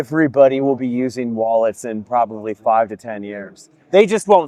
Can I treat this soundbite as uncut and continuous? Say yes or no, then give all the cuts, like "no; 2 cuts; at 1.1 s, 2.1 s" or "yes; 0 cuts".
yes; 0 cuts